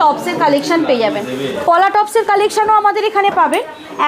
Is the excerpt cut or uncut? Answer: uncut